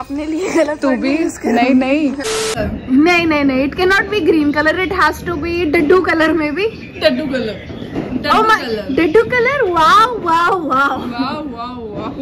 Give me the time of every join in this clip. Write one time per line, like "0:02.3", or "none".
0:02.4